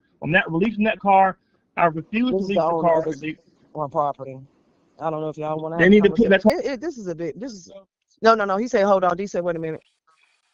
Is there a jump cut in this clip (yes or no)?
yes